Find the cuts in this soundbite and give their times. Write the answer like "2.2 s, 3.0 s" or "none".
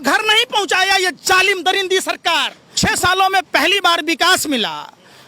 2.6 s